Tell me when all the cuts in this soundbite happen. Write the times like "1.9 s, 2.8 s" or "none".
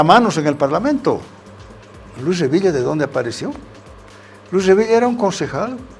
1.3 s

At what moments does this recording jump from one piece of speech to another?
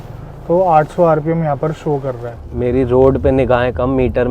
2.4 s

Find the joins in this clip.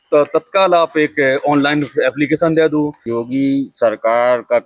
3.0 s

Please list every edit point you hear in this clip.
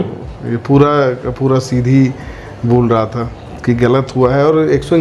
none

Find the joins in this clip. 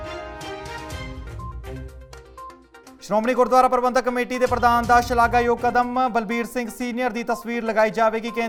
none

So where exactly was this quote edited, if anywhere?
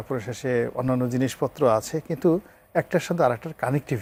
none

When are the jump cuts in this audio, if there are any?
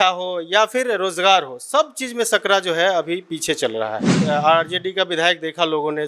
4.2 s

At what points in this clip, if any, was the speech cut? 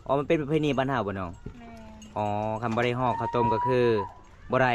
none

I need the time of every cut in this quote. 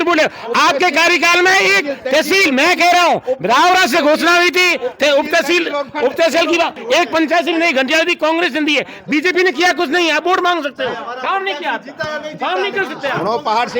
6.8 s

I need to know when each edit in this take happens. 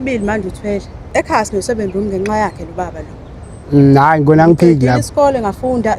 1.0 s

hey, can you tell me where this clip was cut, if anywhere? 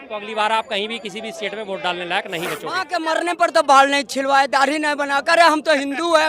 2.9 s

